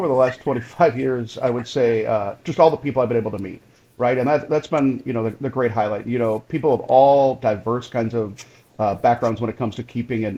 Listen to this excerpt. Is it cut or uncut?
uncut